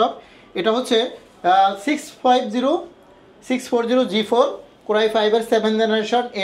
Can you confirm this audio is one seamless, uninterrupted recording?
yes; 0 cuts

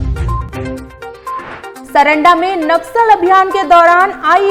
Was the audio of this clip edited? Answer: no; 0 cuts

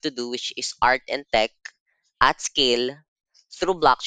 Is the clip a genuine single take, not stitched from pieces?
yes; 0 cuts

